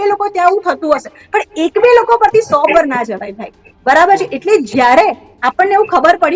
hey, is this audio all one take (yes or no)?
yes